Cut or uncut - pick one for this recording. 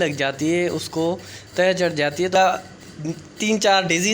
cut